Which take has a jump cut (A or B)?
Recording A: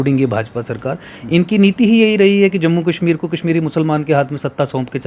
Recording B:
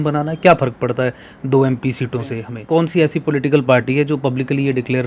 B